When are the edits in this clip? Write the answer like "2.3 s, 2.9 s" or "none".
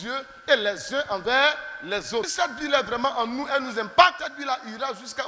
2.3 s, 4.2 s